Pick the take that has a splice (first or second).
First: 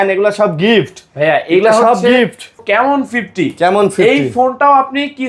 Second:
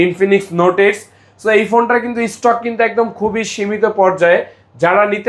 first